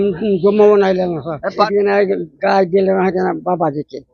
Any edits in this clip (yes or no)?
yes